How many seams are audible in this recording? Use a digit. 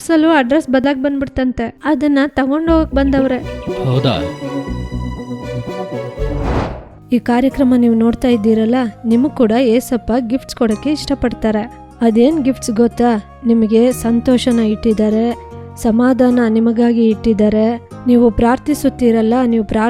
2